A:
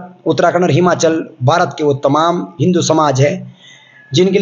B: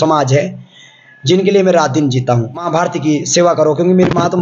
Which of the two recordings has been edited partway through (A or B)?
B